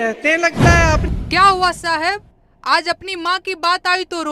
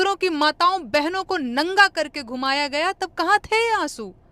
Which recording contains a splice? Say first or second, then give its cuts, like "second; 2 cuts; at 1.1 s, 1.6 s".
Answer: first; 1 cut; at 1.0 s